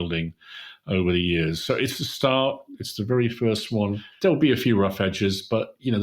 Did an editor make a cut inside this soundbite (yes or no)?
yes